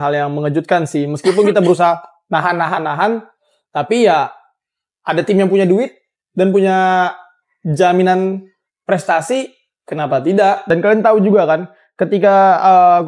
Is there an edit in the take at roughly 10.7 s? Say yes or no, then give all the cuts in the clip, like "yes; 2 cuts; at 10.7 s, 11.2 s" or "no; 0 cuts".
yes; 1 cut; at 10.7 s